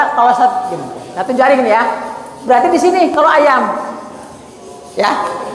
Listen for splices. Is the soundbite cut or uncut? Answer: uncut